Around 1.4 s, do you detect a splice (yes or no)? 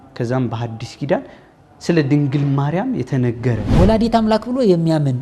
no